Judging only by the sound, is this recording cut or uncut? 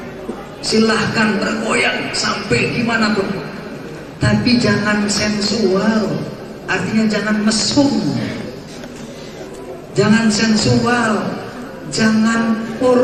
uncut